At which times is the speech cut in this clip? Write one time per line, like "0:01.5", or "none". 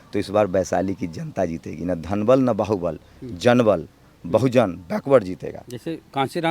none

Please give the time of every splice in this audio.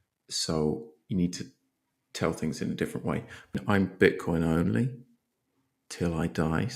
0:03.5

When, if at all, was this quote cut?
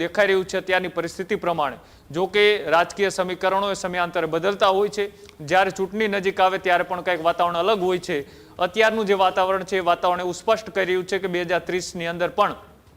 none

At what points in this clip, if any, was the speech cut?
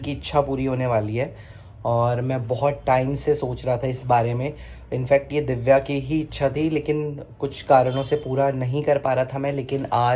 none

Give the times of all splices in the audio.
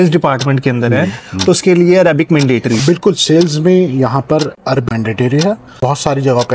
0:02.8
0:04.8
0:05.7

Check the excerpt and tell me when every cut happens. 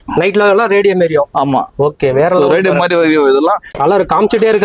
0:03.7

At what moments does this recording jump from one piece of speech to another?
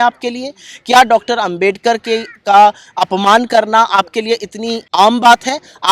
0:04.8

